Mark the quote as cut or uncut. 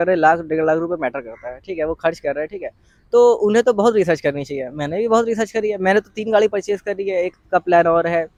uncut